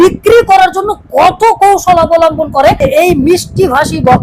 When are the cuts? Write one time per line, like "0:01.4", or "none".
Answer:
0:02.8